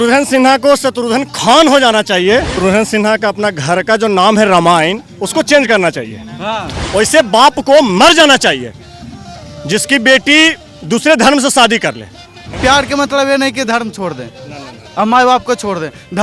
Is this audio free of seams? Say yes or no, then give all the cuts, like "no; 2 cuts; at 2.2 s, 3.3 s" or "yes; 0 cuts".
no; 3 cuts; at 2.5 s, 6.7 s, 12.5 s